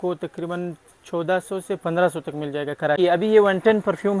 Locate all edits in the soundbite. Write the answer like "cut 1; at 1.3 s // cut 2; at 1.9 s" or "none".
cut 1; at 3.0 s